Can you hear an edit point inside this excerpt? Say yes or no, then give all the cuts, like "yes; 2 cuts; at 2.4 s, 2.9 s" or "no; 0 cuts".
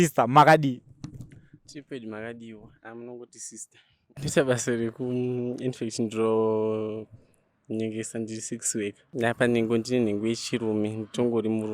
yes; 2 cuts; at 4.1 s, 9.0 s